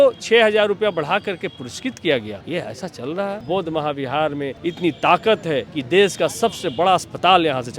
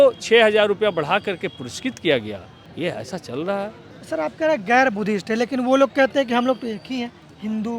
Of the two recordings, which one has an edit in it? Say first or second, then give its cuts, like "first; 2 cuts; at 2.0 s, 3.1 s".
first; 4 cuts; at 2.4 s, 3.4 s, 4.5 s, 5.7 s